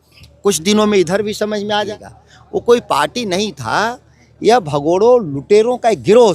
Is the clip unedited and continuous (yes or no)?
no